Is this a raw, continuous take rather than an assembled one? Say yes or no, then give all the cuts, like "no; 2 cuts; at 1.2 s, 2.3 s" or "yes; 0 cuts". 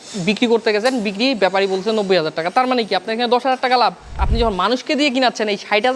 no; 1 cut; at 4.2 s